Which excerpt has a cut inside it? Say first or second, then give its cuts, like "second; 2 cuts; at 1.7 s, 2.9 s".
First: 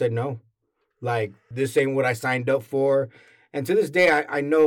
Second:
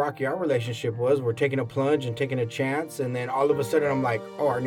first; 1 cut; at 1.5 s